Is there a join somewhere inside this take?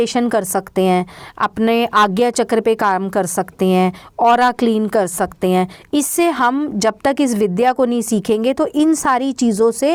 no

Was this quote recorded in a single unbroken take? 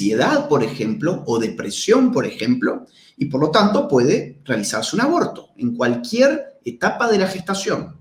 yes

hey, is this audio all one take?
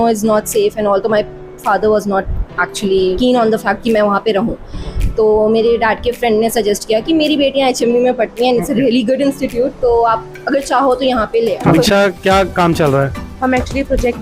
no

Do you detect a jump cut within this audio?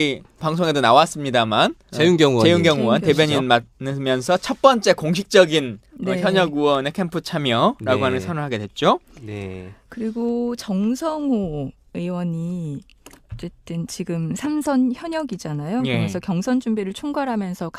no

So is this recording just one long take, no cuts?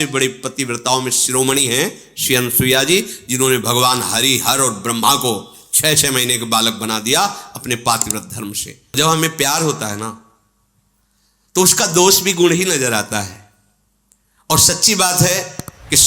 no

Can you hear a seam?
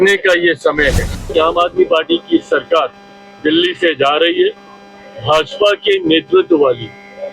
yes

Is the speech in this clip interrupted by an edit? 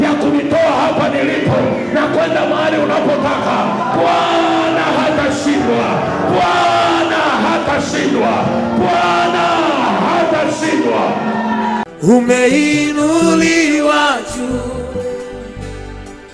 yes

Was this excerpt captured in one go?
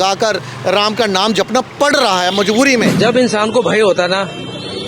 no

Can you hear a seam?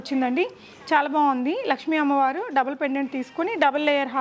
no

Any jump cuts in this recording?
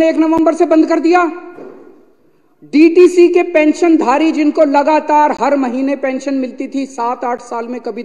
no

